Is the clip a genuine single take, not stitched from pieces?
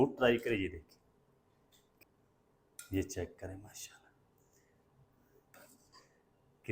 no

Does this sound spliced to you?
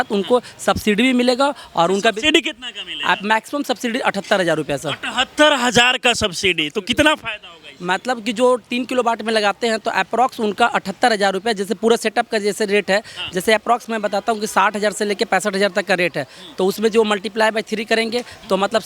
no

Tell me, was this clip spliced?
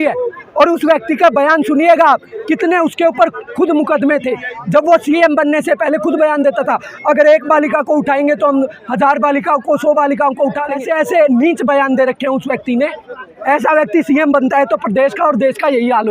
yes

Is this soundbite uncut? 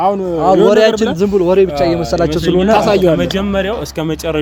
yes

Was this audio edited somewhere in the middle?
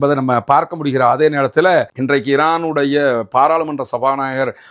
yes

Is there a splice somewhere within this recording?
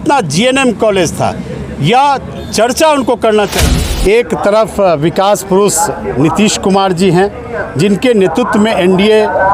yes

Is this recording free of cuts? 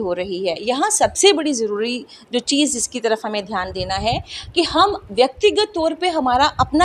yes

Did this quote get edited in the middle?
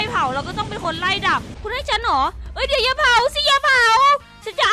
yes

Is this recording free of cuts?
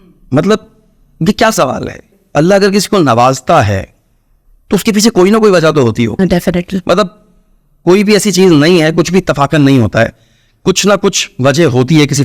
no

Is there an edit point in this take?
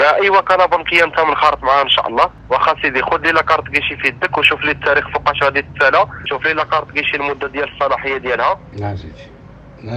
yes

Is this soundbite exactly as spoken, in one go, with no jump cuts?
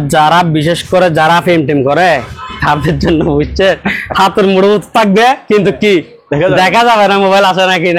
yes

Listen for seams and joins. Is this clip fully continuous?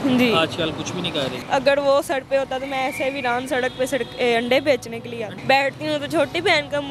no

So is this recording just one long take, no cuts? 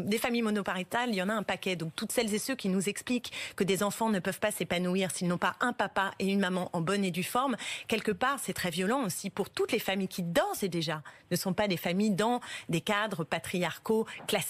yes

